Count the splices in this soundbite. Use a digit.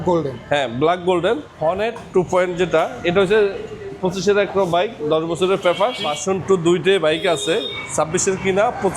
2